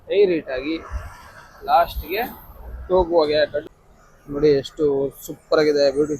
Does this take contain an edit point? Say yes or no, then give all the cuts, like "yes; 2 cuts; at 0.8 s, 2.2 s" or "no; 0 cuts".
yes; 1 cut; at 3.7 s